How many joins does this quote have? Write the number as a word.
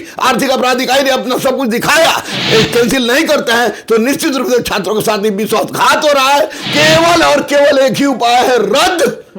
two